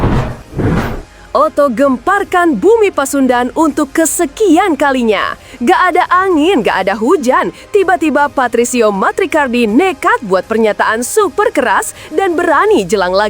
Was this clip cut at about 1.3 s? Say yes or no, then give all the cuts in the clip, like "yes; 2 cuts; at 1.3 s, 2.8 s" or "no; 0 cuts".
yes; 1 cut; at 1.3 s